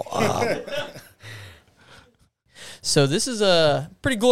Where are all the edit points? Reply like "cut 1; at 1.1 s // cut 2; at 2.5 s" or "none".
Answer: cut 1; at 2.3 s